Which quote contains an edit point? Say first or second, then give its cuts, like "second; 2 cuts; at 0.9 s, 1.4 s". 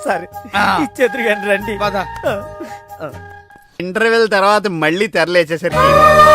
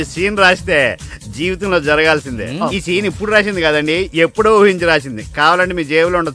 first; 1 cut; at 3.8 s